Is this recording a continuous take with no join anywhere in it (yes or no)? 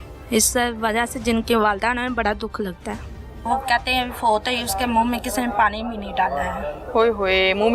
no